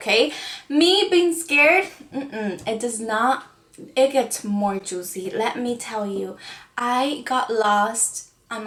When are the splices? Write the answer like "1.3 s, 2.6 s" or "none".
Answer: none